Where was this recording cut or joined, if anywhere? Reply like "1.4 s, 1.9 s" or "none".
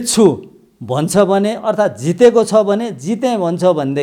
none